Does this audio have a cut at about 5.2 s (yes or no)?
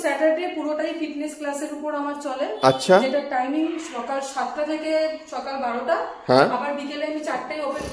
no